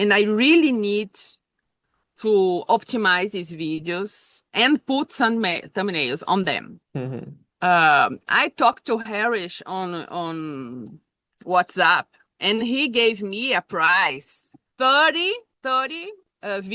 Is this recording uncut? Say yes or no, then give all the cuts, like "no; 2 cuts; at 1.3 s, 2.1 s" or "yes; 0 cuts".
yes; 0 cuts